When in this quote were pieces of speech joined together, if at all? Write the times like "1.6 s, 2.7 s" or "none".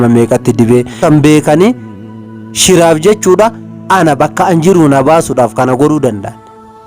1.0 s